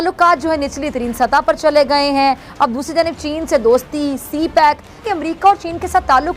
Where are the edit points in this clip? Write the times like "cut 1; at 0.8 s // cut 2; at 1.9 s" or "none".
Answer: cut 1; at 5.0 s